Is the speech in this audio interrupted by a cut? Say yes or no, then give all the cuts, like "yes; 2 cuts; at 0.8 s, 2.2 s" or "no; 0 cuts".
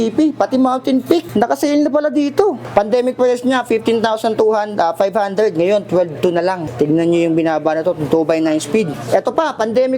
yes; 4 cuts; at 1.3 s, 2.6 s, 6.7 s, 9.0 s